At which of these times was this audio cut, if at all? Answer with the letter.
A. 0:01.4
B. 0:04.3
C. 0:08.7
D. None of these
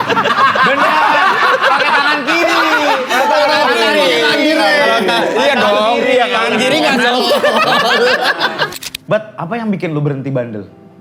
C